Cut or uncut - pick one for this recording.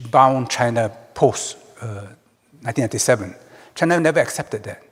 uncut